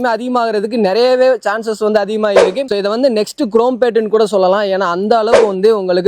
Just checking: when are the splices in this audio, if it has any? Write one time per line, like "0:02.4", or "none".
0:02.6

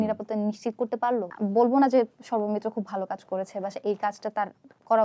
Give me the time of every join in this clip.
0:01.3

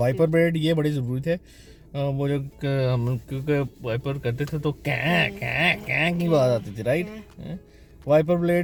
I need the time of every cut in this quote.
none

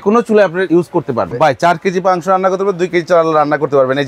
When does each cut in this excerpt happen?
0:01.0

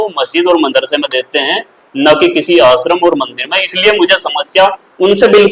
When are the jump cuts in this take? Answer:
none

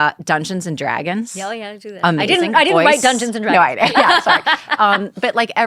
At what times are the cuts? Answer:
none

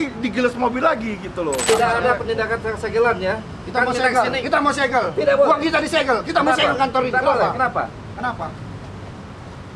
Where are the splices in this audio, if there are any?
0:01.7

